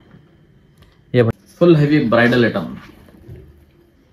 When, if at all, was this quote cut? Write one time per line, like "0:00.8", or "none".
0:01.3